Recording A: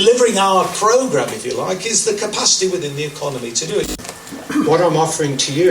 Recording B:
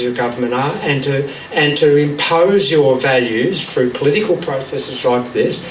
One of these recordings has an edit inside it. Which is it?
A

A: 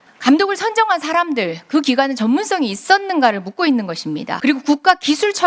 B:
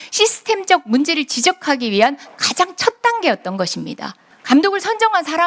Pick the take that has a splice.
A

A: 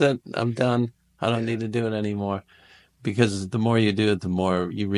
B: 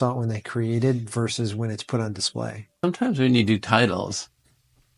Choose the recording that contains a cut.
B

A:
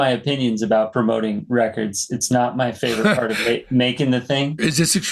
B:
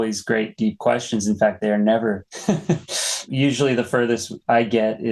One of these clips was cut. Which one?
A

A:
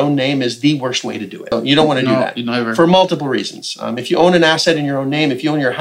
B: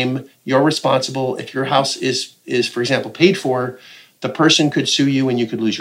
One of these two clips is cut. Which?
A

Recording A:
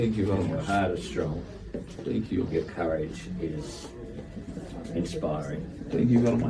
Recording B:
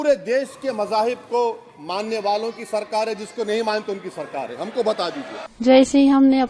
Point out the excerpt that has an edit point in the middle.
B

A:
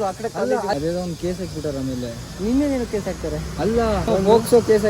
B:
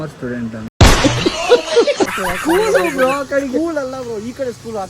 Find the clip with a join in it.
B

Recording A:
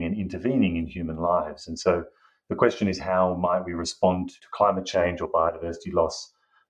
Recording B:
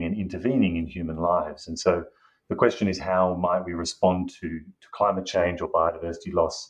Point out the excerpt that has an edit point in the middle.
A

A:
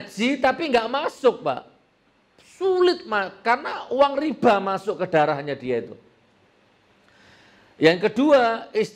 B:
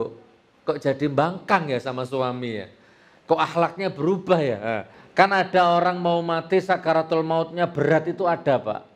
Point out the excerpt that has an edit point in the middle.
B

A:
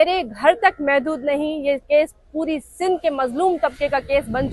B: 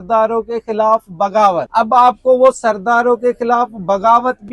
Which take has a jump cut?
B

